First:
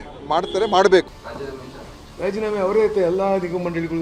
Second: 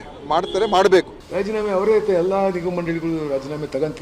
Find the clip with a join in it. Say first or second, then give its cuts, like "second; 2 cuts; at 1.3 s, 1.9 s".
second; 1 cut; at 1.2 s